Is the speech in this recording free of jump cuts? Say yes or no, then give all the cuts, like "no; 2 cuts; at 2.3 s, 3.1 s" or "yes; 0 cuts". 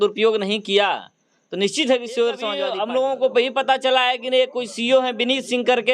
no; 1 cut; at 2.5 s